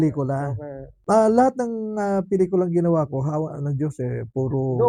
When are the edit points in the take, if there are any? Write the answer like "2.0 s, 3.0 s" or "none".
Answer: none